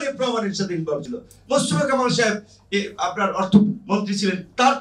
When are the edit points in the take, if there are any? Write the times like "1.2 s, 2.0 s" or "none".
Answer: none